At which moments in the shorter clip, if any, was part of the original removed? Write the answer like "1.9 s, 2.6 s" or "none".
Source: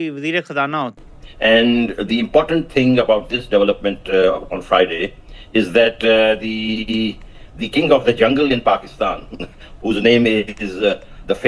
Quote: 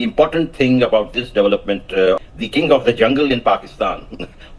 2.3 s